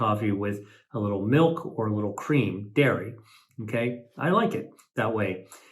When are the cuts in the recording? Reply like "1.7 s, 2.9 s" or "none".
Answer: none